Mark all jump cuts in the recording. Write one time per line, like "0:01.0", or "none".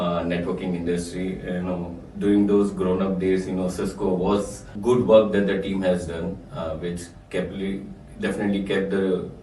0:04.7